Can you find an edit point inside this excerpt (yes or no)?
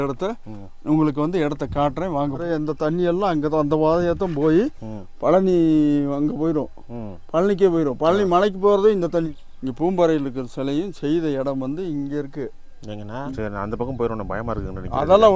yes